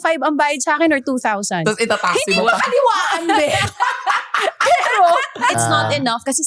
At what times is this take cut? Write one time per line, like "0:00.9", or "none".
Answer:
0:05.5

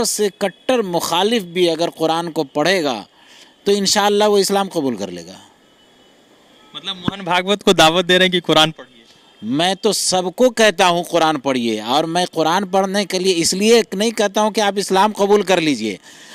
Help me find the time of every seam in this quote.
none

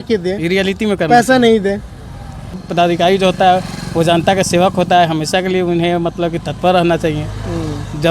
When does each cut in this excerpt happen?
0:02.6

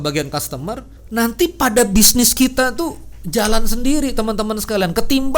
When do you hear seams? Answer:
0:00.9

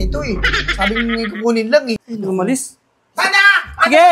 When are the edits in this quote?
0:02.0

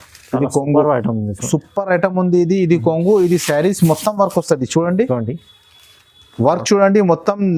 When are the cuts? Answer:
none

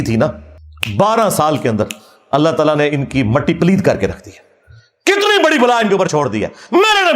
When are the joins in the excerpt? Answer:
none

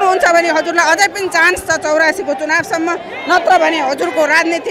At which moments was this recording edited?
none

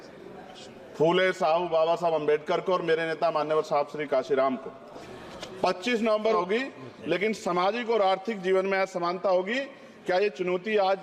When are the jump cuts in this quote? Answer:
0:06.4

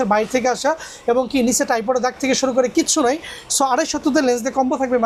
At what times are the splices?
none

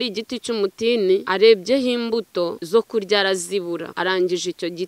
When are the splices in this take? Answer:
0:01.2
0:02.6
0:03.9

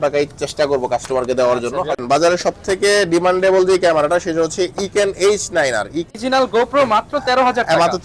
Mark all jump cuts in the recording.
0:02.0
0:06.1

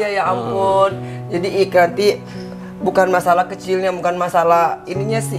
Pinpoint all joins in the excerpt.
0:01.2

